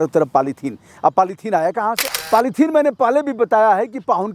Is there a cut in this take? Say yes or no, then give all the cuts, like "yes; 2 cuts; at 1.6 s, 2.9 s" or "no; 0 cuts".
yes; 1 cut; at 2.1 s